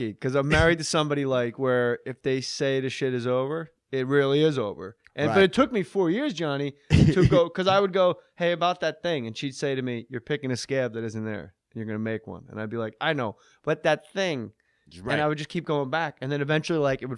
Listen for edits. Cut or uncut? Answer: uncut